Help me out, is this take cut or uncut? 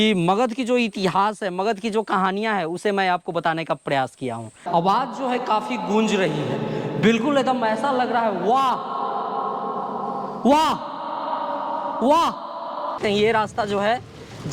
cut